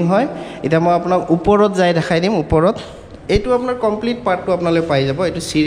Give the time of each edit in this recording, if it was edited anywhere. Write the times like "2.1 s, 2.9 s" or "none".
none

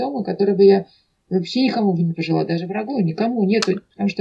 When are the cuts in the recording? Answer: none

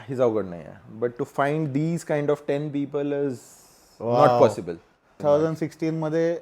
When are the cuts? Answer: 5.2 s

